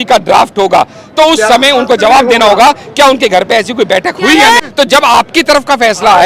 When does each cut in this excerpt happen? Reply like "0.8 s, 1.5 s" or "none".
4.6 s

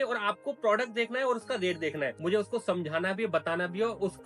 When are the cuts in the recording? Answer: 2.1 s

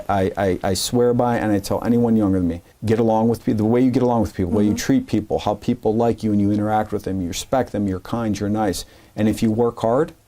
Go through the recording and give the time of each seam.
2.7 s

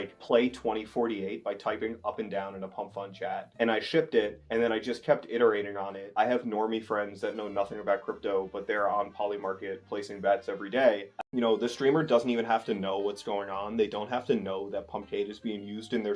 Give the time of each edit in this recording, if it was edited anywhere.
6.0 s, 11.1 s

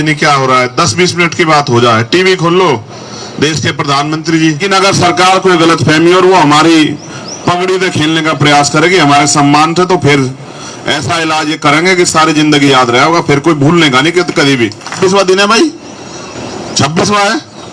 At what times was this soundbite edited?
4.6 s, 15.0 s

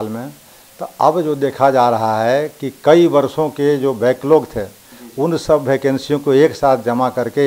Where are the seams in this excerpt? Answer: none

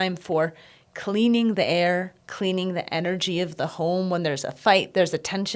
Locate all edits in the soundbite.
none

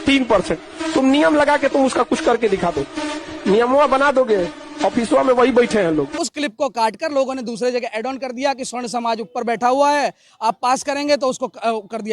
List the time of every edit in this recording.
6.2 s

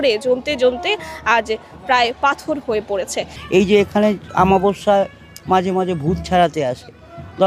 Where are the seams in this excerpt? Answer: 3.3 s

